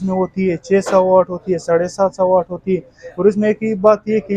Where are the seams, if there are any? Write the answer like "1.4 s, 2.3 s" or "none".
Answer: none